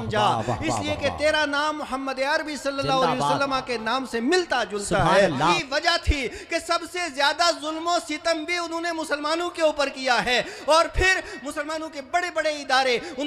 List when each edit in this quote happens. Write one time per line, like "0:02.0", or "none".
0:05.6

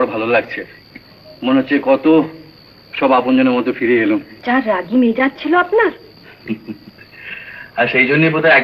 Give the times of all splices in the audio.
0:04.3

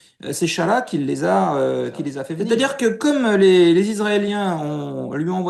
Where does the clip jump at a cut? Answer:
0:02.3

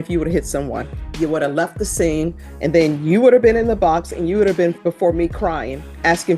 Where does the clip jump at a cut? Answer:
0:01.0
0:02.5
0:04.8

